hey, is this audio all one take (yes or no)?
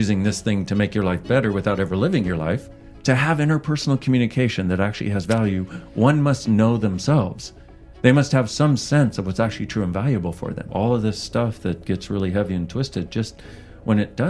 no